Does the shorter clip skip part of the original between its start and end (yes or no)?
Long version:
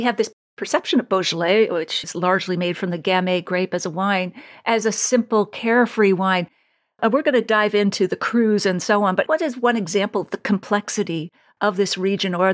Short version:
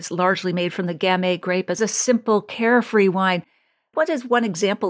yes